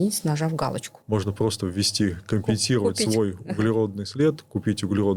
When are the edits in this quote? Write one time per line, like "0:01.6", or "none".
0:00.9